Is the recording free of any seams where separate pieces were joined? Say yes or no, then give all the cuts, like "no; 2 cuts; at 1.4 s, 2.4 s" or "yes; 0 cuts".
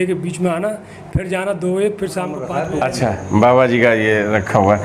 no; 1 cut; at 2.6 s